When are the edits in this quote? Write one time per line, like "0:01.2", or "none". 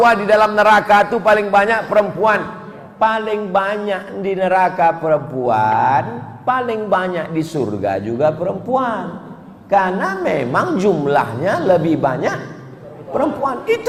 none